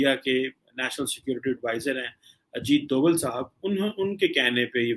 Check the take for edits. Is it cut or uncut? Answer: uncut